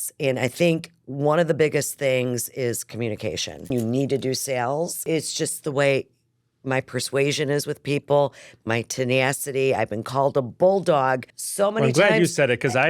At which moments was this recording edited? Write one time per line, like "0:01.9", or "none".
0:03.7
0:05.0

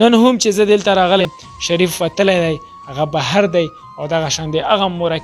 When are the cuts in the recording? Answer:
0:01.2

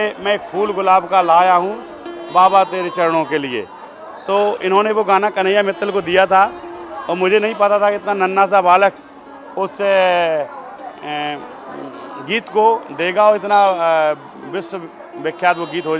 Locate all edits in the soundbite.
none

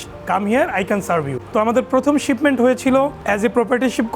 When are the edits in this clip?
0:01.4
0:03.2

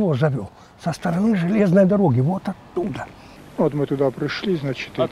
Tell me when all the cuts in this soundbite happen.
0:03.0

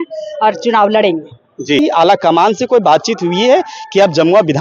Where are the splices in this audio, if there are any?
0:01.8

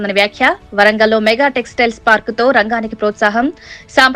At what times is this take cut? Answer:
none

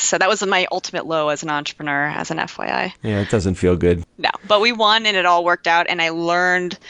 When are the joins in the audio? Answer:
0:04.1

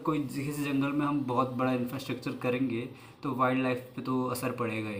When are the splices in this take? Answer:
none

